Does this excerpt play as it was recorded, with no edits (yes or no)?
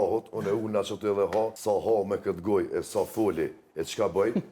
no